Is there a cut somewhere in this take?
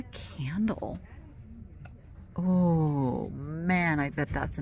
no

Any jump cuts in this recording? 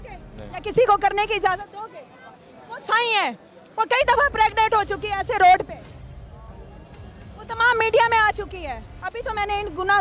no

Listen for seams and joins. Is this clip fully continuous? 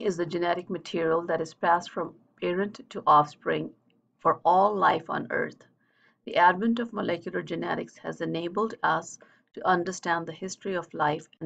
no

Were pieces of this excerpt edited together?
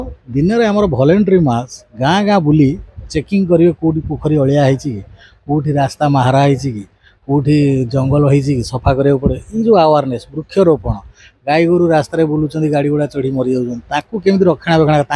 no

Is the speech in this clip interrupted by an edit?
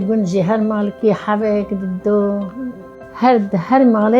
yes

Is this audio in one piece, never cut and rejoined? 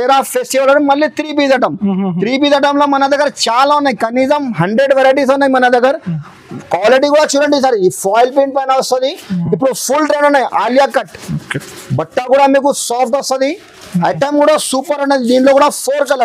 yes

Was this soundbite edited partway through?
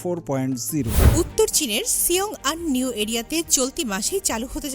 yes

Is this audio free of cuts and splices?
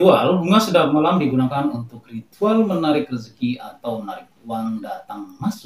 yes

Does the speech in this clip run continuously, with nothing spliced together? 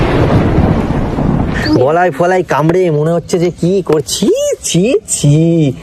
no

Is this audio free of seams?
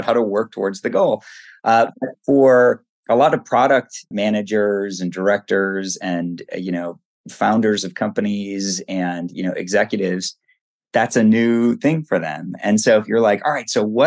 no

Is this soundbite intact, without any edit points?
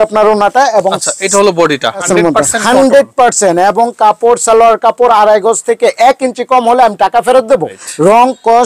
no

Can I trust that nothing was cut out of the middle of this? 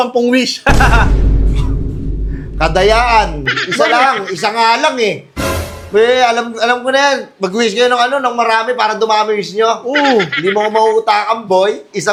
yes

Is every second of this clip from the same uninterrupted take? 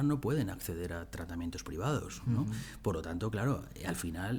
yes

